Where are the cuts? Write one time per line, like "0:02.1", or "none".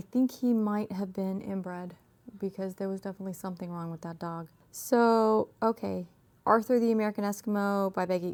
none